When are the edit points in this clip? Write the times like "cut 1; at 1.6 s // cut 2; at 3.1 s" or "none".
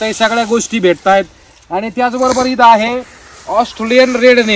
none